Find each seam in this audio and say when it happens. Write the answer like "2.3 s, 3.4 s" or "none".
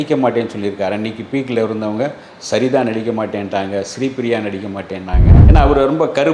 5.3 s